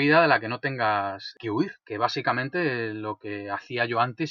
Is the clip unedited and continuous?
no; 1 cut; at 1.8 s

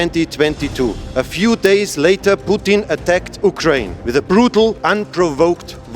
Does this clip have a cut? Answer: no; 0 cuts

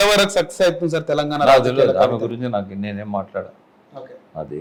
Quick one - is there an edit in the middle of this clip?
no; 0 cuts

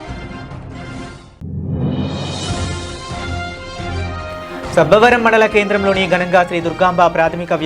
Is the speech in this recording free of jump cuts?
yes; 0 cuts

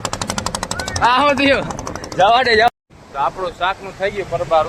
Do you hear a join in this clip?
yes; 1 cut; at 2.7 s

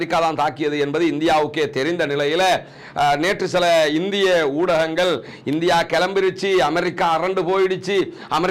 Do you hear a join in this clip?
no; 0 cuts

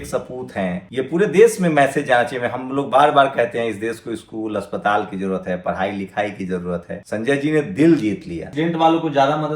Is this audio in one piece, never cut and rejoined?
no; 3 cuts; at 0.8 s, 7.0 s, 8.5 s

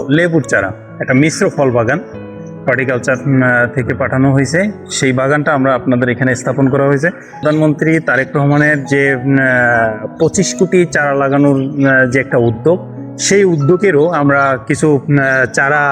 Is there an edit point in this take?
yes; 1 cut; at 7.4 s

